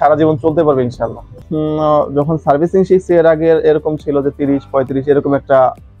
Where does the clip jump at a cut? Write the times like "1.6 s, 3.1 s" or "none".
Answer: 1.4 s